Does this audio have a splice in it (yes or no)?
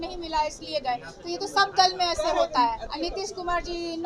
yes